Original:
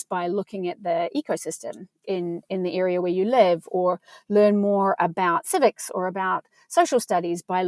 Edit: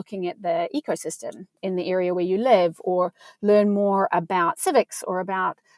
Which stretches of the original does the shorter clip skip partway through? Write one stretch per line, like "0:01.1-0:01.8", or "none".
0:02.0-0:02.4